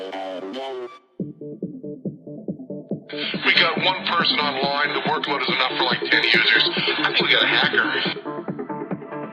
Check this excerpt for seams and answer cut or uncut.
cut